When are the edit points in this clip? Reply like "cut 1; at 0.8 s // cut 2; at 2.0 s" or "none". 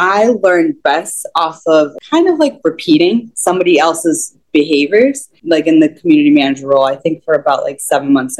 cut 1; at 1.9 s // cut 2; at 5.3 s

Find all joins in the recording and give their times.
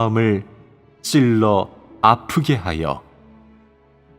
cut 1; at 2.5 s

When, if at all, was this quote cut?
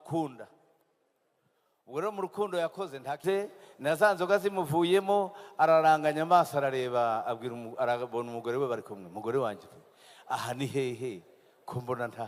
cut 1; at 3.2 s

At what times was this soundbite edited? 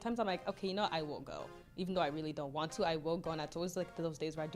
none

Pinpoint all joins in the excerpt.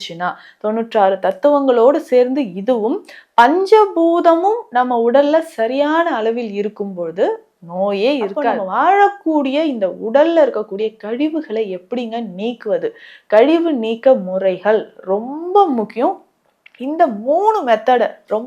cut 1; at 8.5 s

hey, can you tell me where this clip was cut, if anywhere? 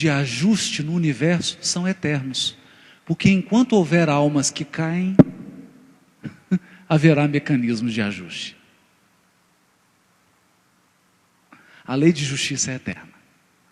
none

